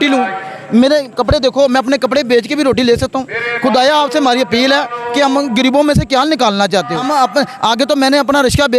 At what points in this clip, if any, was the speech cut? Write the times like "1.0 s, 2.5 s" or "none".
7.0 s

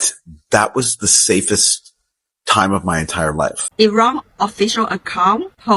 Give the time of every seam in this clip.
3.6 s

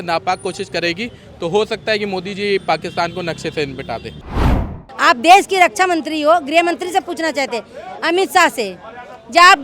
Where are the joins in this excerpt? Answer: 4.4 s

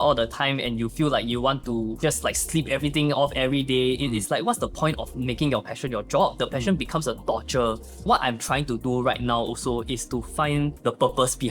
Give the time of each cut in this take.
2.0 s, 8.0 s, 10.8 s

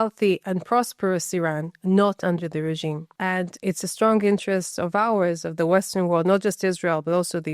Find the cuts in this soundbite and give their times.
3.1 s

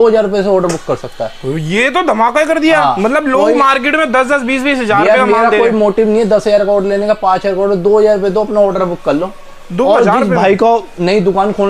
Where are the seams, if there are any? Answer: none

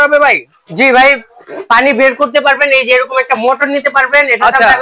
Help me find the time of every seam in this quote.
none

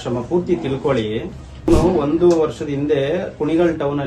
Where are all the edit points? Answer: 1.7 s

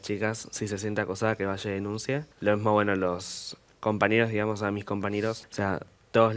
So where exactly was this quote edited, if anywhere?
2.3 s, 5.5 s

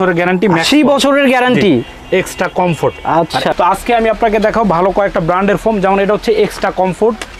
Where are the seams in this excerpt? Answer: 3.5 s

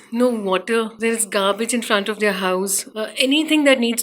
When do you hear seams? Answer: 0.9 s, 2.8 s

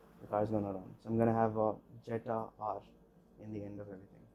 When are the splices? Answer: 0.9 s

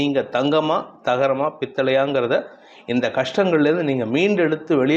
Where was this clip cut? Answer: none

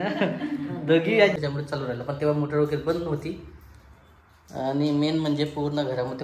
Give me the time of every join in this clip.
1.4 s

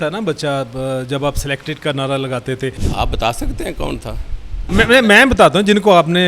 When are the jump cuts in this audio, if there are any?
2.8 s, 4.7 s

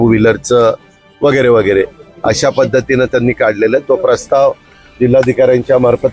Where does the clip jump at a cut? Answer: none

